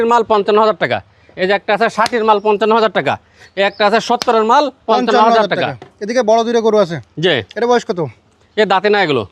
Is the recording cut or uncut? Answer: uncut